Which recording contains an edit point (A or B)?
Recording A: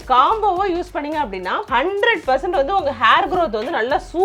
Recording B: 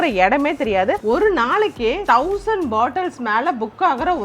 B